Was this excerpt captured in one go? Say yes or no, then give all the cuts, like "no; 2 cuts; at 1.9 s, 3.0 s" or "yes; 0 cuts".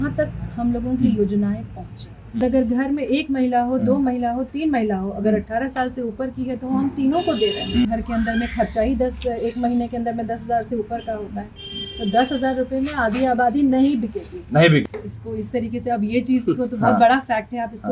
no; 3 cuts; at 2.4 s, 7.8 s, 14.8 s